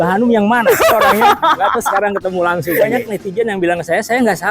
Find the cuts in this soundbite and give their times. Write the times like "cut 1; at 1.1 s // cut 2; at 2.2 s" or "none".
cut 1; at 3.0 s